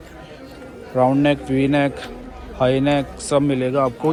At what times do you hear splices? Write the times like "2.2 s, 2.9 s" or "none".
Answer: none